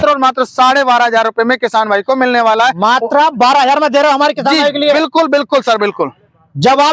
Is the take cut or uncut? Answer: uncut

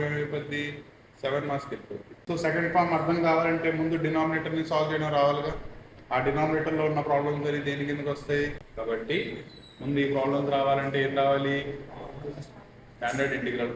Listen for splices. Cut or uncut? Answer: cut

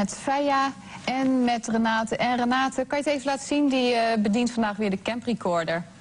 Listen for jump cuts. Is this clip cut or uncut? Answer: cut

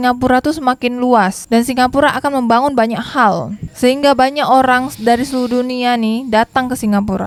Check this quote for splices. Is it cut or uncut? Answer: uncut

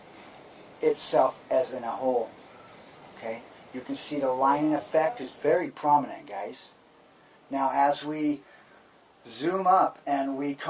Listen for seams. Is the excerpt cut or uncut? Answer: uncut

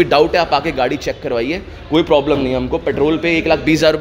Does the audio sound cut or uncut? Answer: uncut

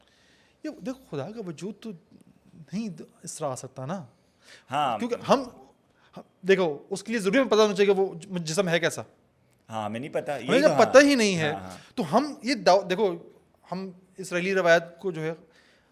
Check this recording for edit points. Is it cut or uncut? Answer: uncut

